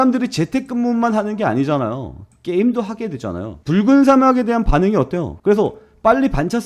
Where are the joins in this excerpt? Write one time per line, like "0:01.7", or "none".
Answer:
0:03.5
0:05.3

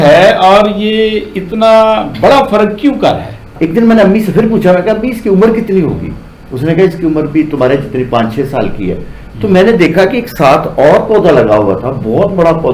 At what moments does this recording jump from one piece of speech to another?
0:03.3

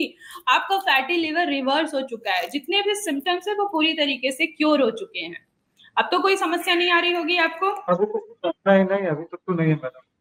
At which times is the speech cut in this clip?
none

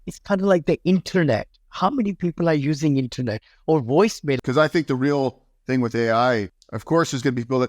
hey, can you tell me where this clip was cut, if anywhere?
0:04.4
0:06.6

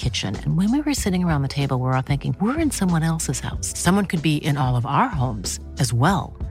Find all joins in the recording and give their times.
none

